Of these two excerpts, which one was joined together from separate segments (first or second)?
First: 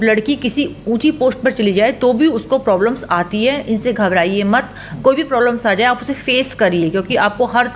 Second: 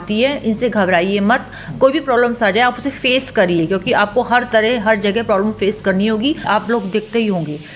second